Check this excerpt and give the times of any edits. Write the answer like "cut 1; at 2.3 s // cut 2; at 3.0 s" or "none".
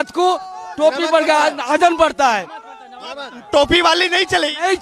none